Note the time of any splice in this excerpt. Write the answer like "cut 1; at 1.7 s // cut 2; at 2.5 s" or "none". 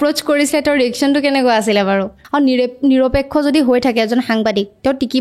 cut 1; at 2.2 s